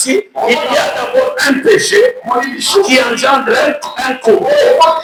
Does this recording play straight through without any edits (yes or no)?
yes